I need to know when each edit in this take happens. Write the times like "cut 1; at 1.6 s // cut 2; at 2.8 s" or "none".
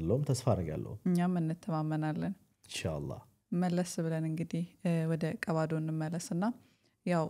none